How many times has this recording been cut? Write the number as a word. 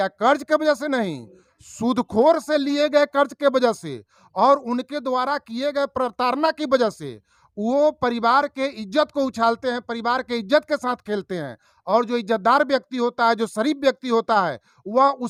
zero